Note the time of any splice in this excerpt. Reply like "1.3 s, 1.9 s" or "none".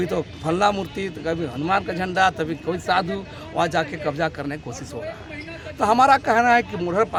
none

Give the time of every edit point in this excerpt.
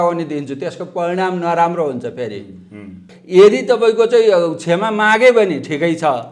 3.1 s

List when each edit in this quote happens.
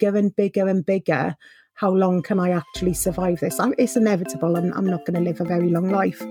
5.4 s

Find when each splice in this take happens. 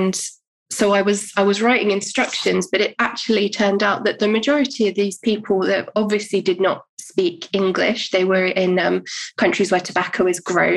none

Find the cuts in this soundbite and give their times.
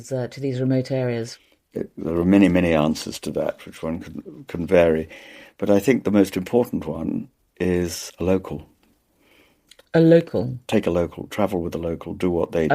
1.3 s

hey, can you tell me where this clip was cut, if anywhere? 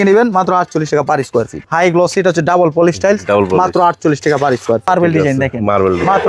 1.6 s, 4.9 s

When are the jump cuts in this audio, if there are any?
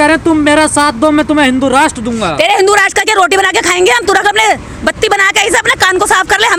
none

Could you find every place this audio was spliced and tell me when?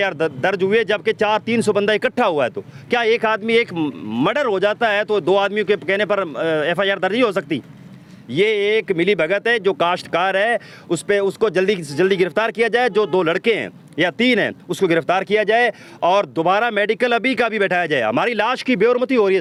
none

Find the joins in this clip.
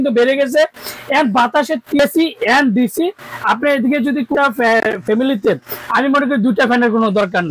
2.0 s, 4.3 s

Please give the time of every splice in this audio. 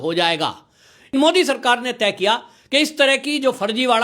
1.1 s

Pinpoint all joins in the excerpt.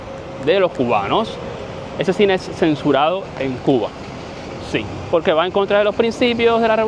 none

